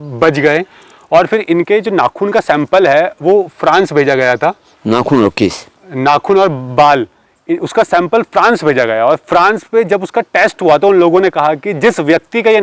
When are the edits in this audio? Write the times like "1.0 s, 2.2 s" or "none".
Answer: none